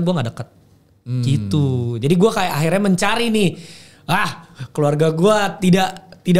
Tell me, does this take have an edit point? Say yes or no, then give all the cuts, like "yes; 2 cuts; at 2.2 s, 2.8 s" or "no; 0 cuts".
no; 0 cuts